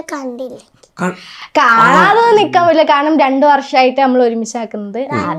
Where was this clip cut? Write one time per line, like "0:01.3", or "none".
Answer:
none